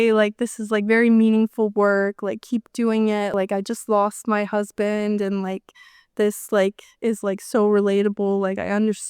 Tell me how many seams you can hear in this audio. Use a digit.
1